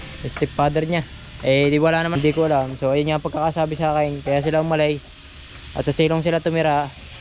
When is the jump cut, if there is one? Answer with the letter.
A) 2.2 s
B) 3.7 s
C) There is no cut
A